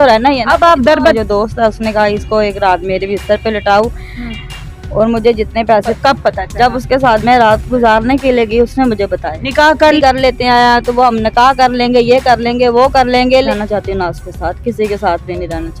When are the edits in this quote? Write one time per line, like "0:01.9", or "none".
0:01.1
0:06.0
0:10.0
0:13.5